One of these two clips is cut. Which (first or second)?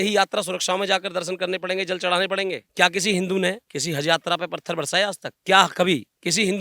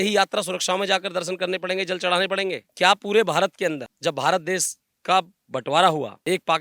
first